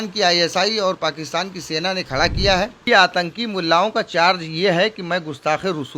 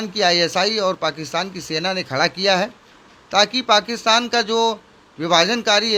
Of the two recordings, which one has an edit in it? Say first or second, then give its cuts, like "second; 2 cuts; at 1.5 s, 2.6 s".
first; 1 cut; at 2.9 s